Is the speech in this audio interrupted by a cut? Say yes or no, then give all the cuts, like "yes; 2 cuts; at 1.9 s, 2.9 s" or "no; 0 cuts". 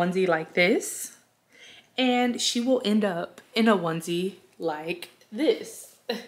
no; 0 cuts